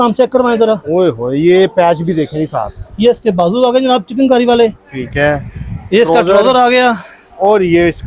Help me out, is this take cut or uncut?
uncut